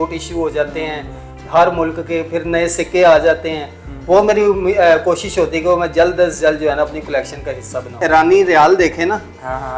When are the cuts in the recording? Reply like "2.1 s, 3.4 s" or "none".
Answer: 8.0 s